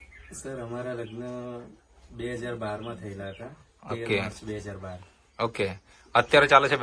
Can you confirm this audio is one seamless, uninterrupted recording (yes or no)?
yes